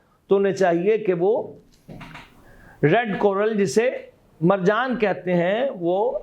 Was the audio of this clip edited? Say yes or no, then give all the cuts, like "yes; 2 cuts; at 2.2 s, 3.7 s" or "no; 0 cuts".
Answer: no; 0 cuts